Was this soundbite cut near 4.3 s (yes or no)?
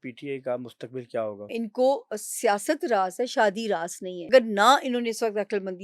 yes